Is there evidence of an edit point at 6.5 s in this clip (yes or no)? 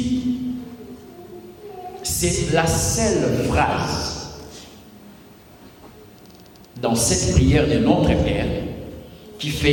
no